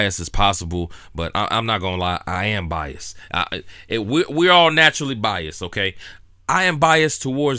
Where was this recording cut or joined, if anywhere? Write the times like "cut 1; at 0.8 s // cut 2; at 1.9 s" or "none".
none